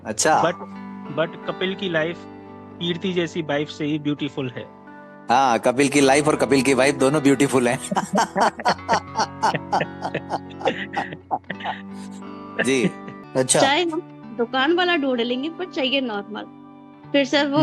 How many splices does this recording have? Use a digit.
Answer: 1